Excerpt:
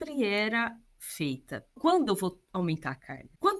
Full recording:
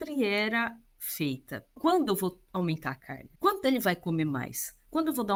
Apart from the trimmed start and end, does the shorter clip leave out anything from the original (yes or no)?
no